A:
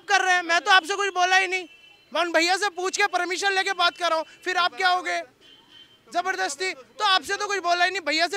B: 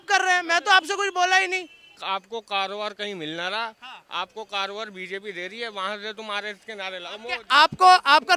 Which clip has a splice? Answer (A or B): B